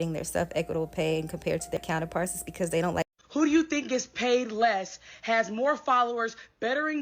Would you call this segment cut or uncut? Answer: cut